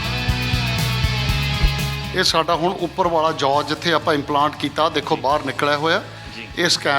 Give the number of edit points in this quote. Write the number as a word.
one